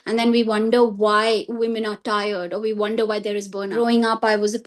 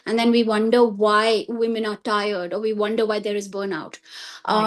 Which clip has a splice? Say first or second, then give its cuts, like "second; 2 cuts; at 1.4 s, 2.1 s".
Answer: first; 1 cut; at 3.7 s